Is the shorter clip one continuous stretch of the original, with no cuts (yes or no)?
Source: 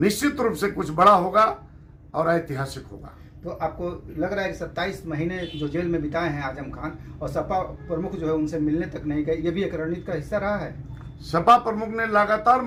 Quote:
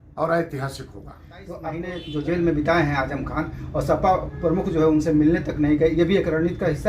no